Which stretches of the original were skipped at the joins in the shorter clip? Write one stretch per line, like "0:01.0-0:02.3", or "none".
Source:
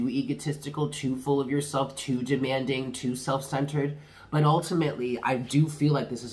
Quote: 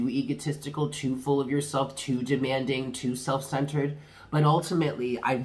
none

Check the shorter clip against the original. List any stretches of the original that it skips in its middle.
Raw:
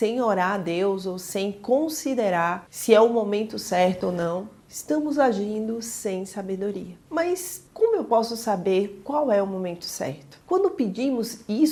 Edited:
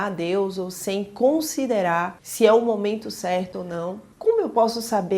0:04.5-0:07.6

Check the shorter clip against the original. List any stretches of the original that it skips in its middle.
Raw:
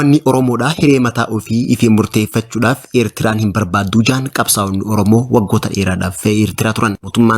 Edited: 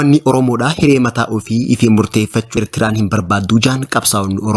0:02.6-0:03.0

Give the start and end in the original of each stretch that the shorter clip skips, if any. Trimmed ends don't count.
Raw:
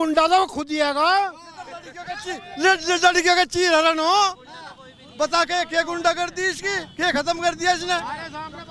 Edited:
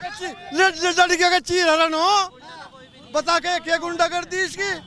none

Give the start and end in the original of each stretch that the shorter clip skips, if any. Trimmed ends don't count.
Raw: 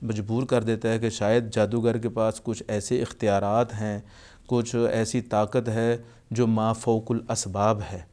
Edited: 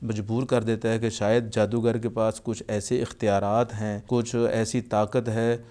0:03.9-0:04.3

